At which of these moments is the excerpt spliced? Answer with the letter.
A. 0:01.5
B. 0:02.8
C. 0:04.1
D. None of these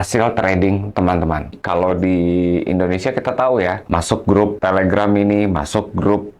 A